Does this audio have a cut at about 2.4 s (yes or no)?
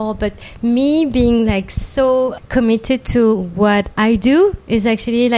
yes